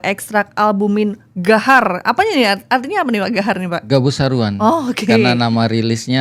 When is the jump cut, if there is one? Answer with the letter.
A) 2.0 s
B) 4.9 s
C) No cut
C